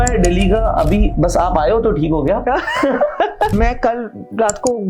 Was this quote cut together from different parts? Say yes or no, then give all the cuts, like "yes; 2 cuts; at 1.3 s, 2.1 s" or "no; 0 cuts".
yes; 1 cut; at 3.5 s